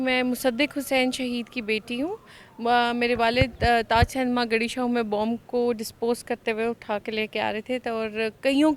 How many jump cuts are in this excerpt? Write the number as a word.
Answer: zero